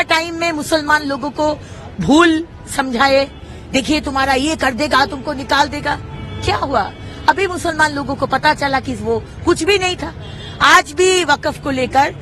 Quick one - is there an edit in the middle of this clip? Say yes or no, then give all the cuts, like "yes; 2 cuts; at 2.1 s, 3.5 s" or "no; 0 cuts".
no; 0 cuts